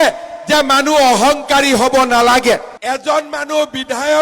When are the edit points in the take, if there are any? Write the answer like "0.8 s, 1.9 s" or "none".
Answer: 2.8 s